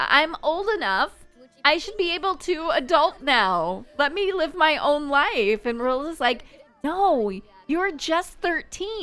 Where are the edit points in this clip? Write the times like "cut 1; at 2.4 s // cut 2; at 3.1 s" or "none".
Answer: none